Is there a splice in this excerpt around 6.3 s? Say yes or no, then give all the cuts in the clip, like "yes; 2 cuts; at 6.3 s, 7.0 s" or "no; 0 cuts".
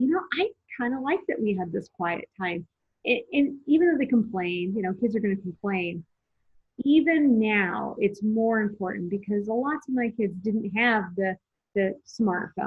no; 0 cuts